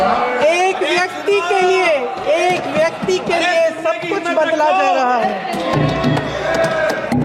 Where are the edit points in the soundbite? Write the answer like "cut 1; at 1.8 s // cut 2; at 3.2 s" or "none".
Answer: none